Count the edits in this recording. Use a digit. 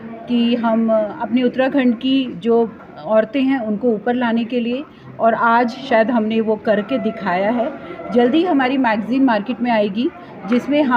0